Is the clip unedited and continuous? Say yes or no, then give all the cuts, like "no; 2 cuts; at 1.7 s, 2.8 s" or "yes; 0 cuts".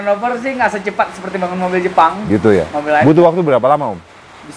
yes; 0 cuts